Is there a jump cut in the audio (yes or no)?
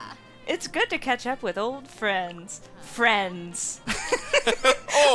no